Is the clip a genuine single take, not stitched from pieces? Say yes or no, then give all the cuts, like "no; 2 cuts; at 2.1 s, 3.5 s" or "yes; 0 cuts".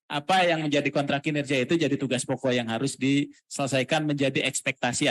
yes; 0 cuts